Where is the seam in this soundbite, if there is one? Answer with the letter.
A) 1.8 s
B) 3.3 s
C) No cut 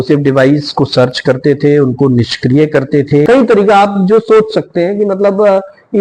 B